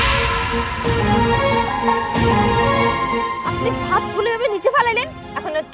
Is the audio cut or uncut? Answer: uncut